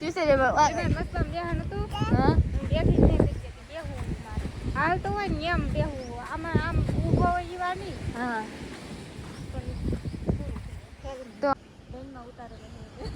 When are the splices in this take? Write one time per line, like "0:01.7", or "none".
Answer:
0:11.5